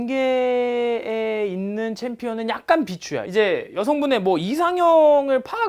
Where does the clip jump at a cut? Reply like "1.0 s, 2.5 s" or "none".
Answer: 3.2 s